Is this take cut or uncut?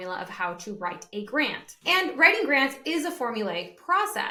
uncut